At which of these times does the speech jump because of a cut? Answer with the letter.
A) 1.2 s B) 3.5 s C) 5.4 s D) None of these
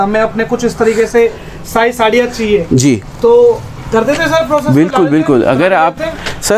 D